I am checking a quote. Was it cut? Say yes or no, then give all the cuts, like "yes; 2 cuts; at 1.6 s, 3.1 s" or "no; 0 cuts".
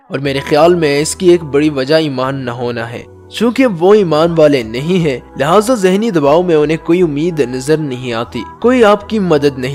no; 0 cuts